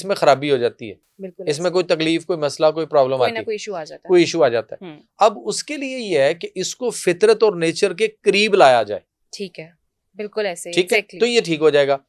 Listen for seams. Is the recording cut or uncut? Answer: uncut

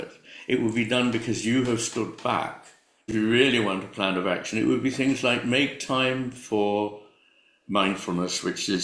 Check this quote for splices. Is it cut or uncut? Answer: cut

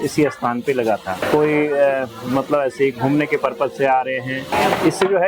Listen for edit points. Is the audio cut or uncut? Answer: cut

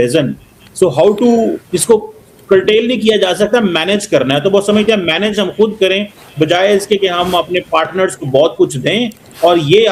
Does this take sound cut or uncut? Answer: uncut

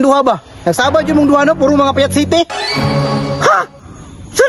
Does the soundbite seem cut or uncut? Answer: uncut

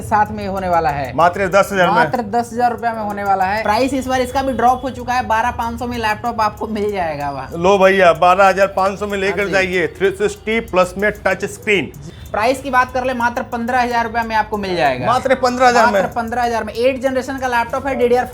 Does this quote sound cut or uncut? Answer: cut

